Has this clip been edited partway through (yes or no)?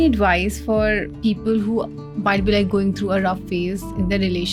no